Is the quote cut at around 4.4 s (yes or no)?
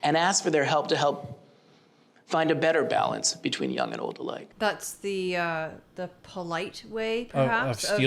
yes